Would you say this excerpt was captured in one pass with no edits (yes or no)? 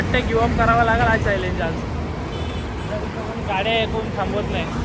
yes